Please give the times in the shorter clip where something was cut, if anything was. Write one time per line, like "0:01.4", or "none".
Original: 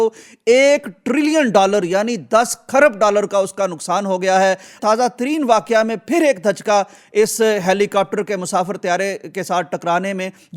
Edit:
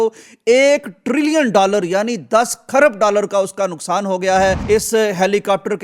0:04.6